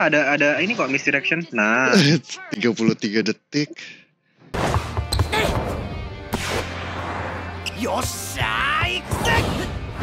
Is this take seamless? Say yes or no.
yes